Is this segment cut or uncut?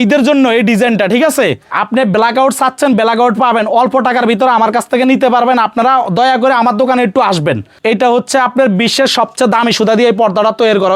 cut